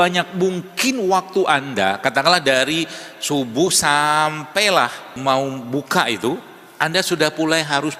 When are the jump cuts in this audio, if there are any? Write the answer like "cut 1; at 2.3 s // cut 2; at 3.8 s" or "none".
cut 1; at 5.2 s